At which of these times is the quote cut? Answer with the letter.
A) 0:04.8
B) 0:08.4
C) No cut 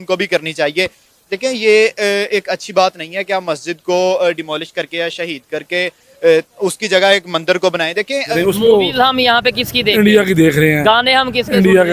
B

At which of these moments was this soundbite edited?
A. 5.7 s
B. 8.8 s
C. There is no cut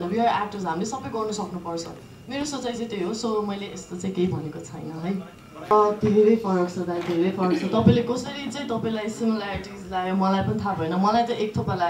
A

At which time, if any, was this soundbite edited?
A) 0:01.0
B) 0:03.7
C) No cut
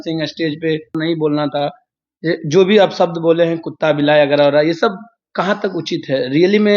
A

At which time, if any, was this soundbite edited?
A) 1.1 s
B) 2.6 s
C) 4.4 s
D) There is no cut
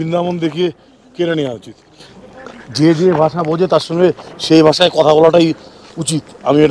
D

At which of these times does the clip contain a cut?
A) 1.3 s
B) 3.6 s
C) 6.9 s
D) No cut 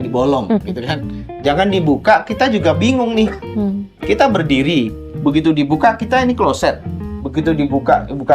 A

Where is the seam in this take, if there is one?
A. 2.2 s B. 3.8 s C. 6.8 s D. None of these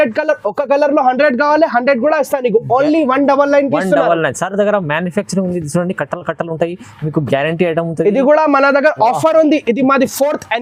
D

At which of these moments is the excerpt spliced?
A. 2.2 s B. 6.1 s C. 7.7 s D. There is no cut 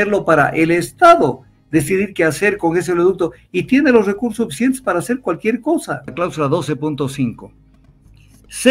B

